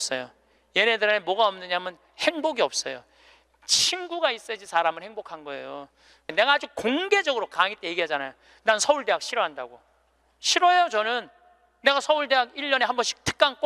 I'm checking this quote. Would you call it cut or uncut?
cut